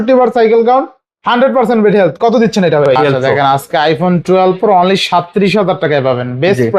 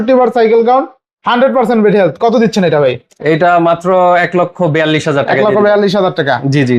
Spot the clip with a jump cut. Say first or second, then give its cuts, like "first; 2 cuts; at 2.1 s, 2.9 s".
first; 1 cut; at 2.9 s